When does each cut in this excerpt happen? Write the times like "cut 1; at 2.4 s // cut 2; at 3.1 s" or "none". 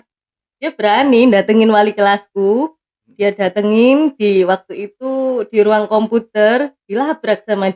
none